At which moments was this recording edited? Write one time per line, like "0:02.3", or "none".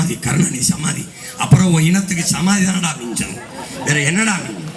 none

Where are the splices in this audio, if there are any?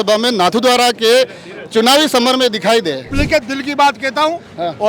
0:03.1

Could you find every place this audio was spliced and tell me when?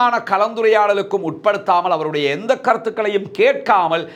none

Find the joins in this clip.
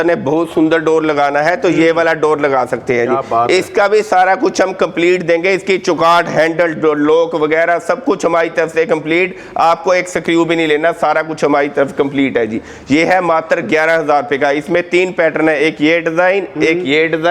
none

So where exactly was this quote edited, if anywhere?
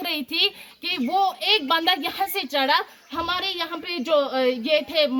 none

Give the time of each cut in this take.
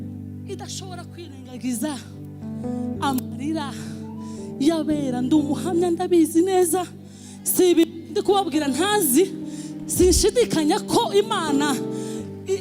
none

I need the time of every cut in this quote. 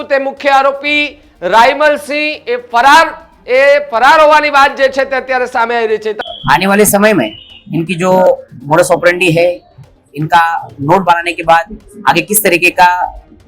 0:06.2

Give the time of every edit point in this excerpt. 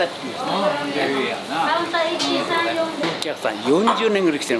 0:03.0

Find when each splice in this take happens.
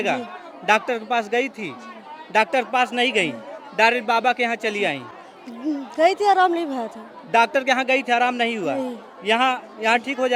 none

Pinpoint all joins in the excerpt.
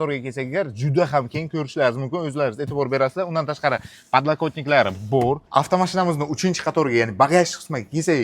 0:05.4

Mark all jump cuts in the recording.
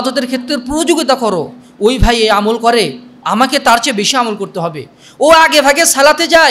none

